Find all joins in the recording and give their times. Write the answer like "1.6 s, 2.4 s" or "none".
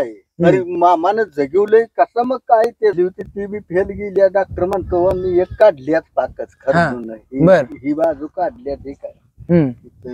2.9 s